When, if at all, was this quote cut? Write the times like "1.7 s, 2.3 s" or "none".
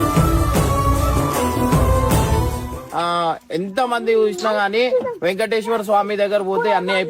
2.8 s